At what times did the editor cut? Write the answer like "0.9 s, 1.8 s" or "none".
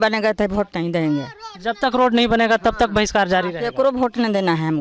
none

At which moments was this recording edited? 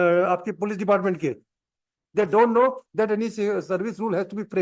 none

